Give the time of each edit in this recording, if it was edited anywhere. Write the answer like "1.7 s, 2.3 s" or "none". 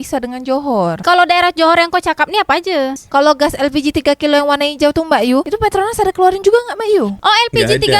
3.0 s